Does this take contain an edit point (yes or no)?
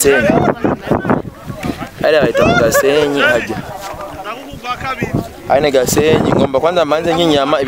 no